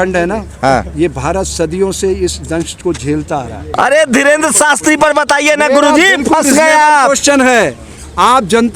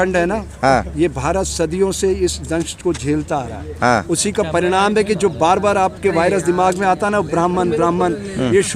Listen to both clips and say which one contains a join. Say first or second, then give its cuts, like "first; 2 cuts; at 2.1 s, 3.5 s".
first; 1 cut; at 3.6 s